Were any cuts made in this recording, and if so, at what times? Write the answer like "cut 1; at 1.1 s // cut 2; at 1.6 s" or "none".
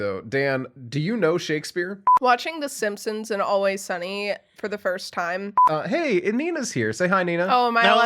cut 1; at 2.0 s // cut 2; at 5.6 s